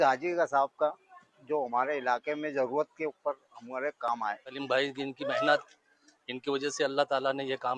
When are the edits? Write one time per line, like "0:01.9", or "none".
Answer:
0:04.5

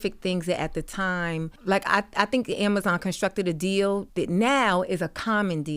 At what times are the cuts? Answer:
0:01.5
0:04.1

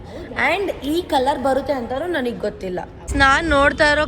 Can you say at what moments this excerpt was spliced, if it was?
0:03.0

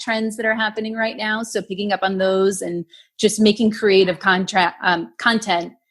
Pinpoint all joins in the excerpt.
none

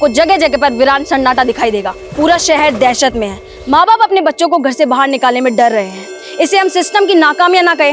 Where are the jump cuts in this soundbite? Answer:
0:02.0

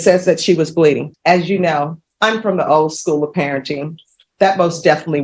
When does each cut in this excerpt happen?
0:01.1
0:02.0

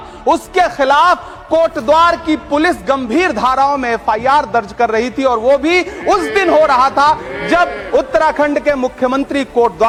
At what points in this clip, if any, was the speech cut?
none

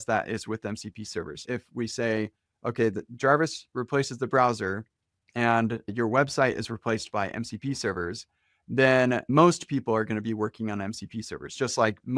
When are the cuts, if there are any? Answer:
0:01.4
0:05.9
0:09.3

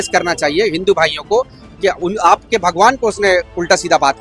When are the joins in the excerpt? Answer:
none

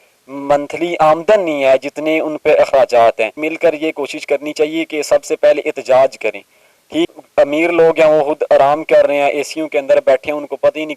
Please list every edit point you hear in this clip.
0:03.4
0:07.1

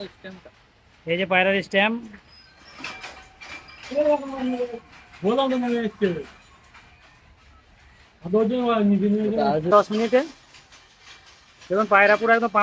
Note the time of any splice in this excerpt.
0:09.7

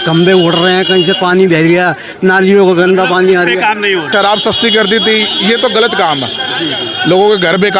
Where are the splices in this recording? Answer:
0:04.1

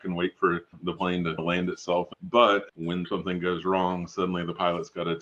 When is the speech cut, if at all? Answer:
0:02.1
0:03.1

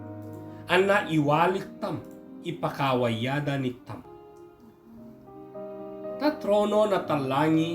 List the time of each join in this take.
0:04.0
0:06.2

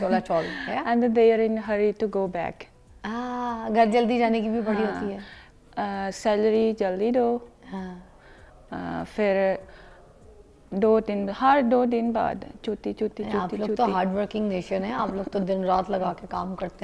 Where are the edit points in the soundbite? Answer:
none

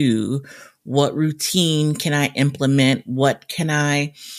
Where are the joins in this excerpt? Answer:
none

